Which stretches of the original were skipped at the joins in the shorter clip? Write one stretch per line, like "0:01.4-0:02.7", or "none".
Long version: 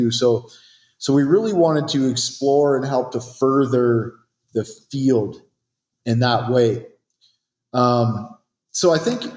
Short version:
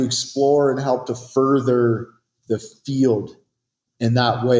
none